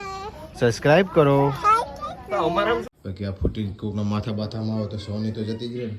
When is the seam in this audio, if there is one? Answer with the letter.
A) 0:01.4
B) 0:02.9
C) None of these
B